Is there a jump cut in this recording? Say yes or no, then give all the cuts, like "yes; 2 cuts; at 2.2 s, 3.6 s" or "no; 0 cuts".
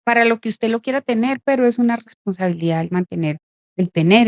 yes; 1 cut; at 1.4 s